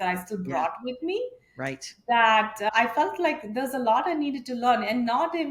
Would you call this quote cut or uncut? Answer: uncut